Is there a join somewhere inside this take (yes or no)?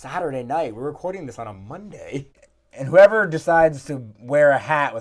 yes